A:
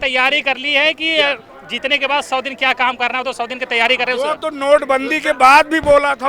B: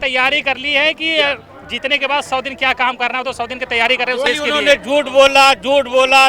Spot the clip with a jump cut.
B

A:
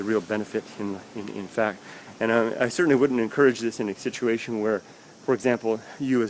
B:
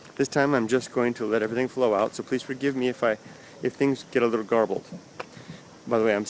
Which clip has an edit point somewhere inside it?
A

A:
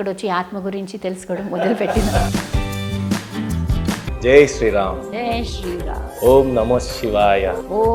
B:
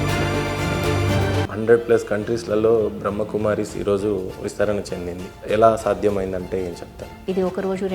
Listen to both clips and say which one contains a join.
B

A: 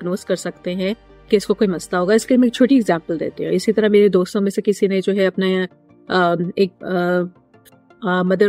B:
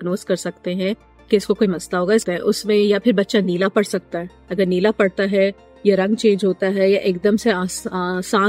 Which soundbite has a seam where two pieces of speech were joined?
B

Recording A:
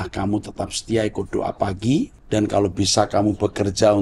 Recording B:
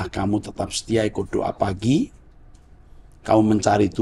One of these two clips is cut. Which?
A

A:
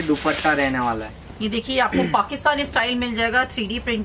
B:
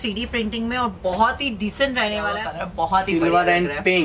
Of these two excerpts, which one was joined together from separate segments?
B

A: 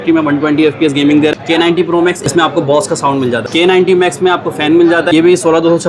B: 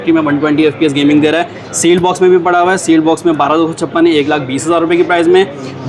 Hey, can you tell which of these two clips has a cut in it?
A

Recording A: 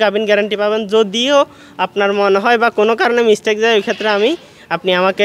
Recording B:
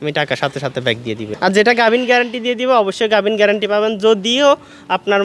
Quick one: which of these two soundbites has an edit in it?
B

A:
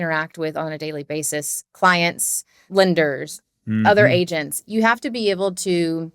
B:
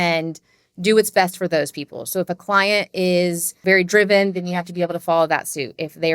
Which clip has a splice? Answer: B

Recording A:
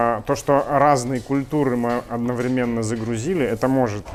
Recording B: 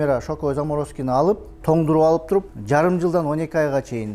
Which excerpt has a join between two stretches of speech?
B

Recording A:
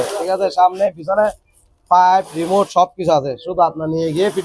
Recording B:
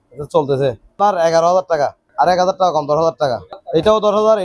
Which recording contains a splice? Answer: B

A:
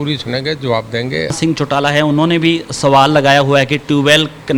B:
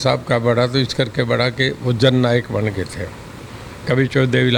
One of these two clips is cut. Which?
A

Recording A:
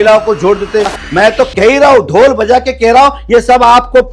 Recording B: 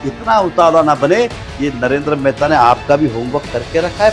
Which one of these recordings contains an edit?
A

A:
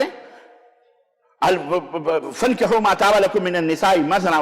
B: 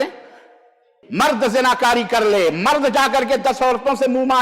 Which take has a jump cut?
B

